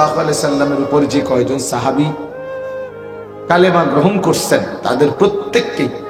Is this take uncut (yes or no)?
no